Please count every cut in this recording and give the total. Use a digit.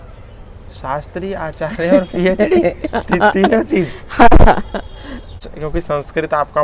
1